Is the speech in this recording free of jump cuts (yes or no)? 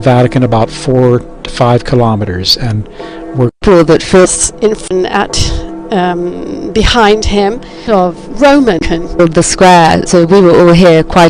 yes